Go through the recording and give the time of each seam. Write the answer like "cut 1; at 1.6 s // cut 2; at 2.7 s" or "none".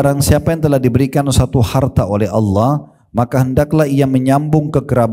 none